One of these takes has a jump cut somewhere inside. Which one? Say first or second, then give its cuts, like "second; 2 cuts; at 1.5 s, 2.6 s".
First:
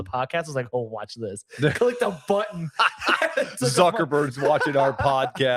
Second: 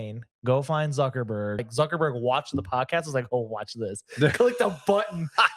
second; 1 cut; at 1.7 s